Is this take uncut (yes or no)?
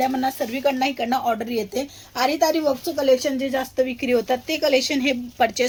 yes